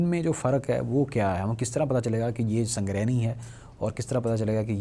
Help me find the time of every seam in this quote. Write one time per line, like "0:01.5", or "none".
none